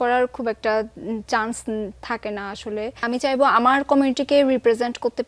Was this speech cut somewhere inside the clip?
yes; 1 cut; at 3.0 s

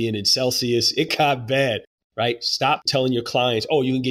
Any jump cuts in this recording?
yes; 3 cuts; at 1.1 s, 2.0 s, 2.8 s

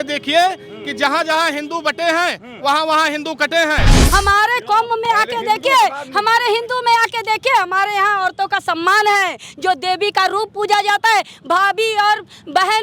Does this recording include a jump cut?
yes; 1 cut; at 4.0 s

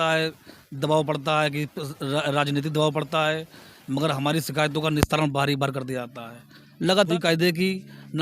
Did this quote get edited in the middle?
yes; 1 cut; at 7.1 s

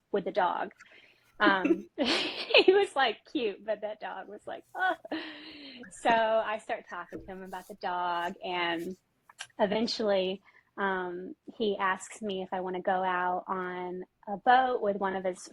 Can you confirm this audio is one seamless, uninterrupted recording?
yes; 0 cuts

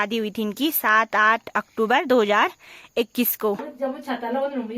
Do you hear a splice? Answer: yes; 1 cut; at 3.7 s

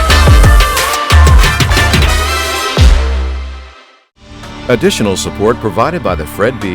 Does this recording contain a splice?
yes; 1 cut; at 4.6 s

